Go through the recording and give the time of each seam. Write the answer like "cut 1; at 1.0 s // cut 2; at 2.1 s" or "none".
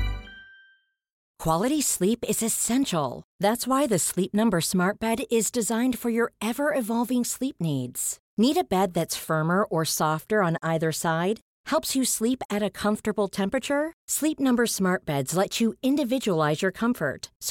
cut 1; at 1.3 s